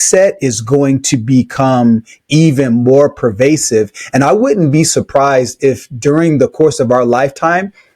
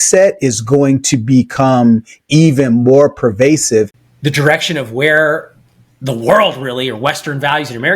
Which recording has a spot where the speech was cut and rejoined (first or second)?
second